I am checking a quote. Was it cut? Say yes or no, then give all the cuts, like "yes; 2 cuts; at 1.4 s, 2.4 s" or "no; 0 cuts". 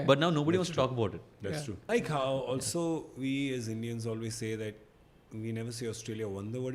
yes; 1 cut; at 1.8 s